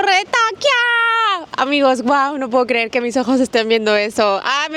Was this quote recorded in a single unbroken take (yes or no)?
yes